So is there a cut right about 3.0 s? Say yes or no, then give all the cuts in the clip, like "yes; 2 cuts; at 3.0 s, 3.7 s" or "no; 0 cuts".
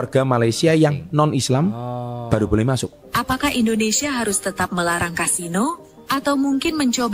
yes; 1 cut; at 3.0 s